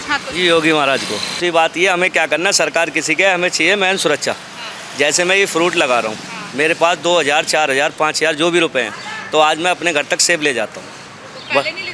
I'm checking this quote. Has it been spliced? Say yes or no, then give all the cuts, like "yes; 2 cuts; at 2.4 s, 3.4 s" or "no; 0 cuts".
yes; 1 cut; at 1.4 s